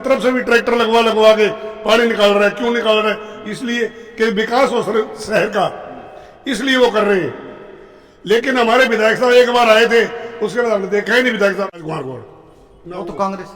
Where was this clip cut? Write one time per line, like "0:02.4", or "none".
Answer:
0:11.8